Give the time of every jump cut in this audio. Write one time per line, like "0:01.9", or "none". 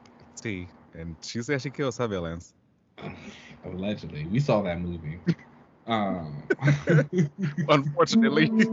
none